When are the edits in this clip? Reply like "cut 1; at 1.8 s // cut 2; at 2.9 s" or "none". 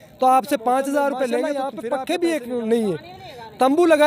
cut 1; at 1.7 s